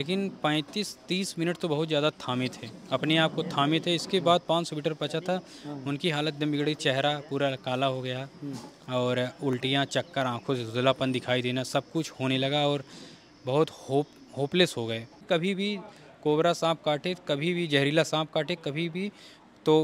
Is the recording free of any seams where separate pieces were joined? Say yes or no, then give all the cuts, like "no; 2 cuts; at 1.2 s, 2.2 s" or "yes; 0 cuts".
no; 1 cut; at 15.2 s